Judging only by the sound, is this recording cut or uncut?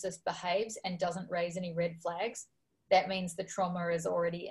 uncut